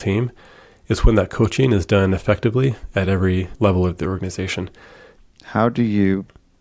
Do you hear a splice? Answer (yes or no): yes